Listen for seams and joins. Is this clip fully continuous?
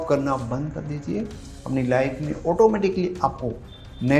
yes; 0 cuts

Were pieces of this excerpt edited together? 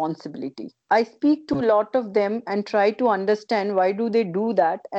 no; 0 cuts

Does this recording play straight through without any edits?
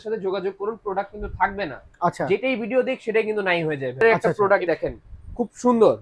no; 1 cut; at 4.0 s

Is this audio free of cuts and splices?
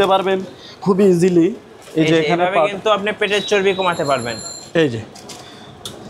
no; 1 cut; at 4.5 s

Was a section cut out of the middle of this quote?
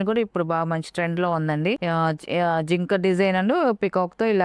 yes; 1 cut; at 1.8 s

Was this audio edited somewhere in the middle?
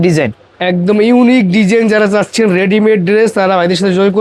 no; 0 cuts

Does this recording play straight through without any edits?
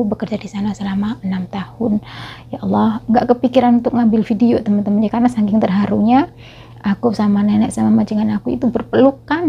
yes; 0 cuts

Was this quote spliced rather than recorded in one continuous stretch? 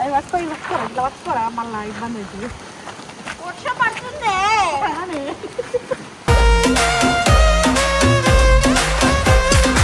no; 0 cuts

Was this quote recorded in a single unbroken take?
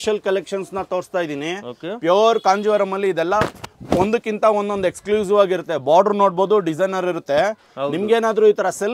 yes; 0 cuts

